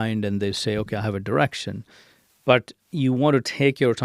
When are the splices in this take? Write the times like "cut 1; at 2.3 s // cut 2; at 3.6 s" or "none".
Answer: cut 1; at 2.8 s